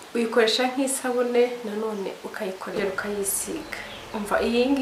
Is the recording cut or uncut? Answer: cut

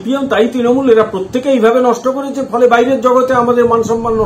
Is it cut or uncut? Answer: uncut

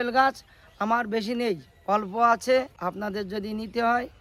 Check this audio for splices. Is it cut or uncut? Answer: cut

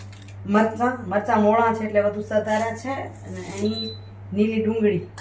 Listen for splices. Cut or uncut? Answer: uncut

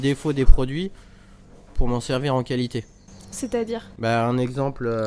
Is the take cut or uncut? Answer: uncut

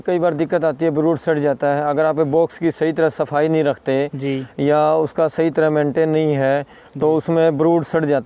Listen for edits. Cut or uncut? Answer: uncut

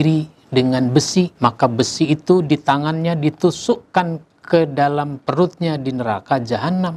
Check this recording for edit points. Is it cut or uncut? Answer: cut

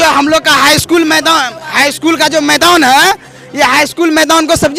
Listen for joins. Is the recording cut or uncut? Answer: uncut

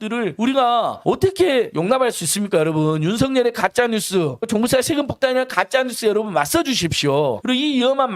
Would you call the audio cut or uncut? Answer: cut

